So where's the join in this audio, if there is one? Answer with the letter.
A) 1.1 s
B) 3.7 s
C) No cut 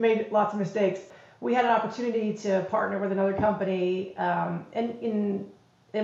A